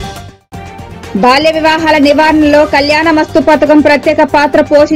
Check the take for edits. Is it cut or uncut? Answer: cut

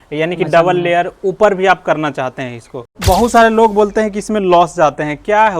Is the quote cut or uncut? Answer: cut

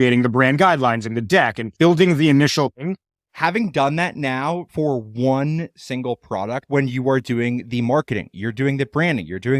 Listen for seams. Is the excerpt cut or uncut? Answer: cut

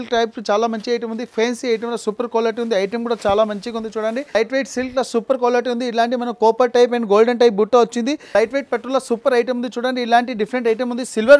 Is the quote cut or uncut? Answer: cut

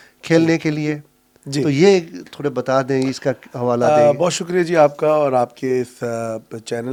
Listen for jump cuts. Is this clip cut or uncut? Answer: uncut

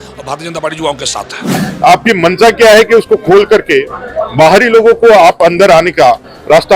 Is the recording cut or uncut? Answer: cut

